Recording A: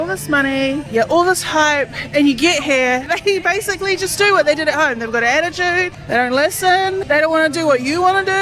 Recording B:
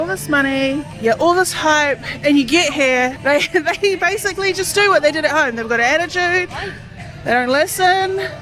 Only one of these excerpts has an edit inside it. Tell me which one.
A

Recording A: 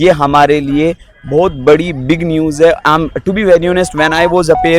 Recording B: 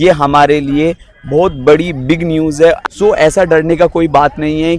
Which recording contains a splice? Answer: B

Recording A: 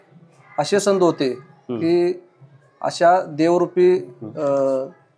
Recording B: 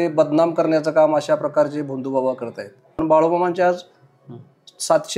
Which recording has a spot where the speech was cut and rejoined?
B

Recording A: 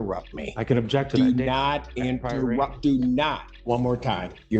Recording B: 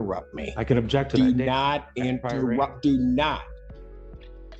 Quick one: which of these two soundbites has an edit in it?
A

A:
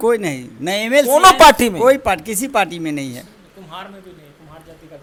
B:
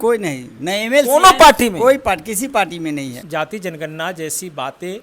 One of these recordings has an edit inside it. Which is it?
B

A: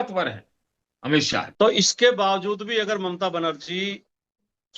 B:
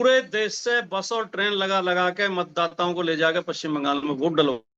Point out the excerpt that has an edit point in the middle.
A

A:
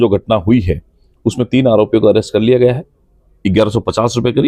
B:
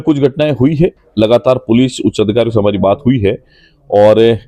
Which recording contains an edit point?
A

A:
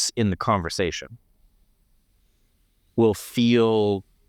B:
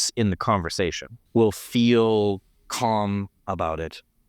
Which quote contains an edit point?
B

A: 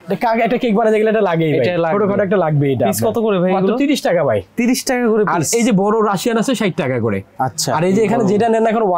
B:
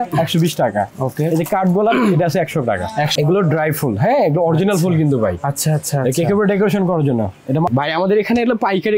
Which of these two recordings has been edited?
B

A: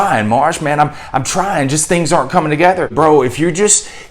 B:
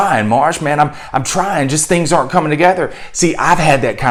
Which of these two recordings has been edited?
A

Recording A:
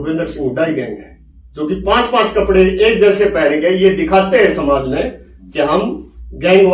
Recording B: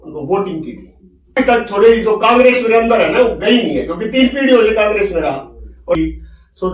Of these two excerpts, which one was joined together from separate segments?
B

